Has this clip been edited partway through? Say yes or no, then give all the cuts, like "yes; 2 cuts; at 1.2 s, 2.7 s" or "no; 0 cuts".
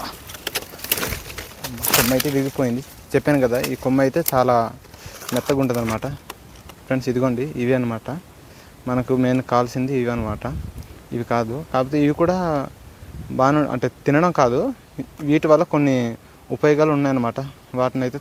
no; 0 cuts